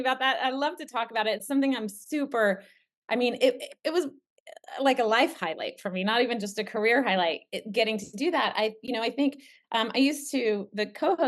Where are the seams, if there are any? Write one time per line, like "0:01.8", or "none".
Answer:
none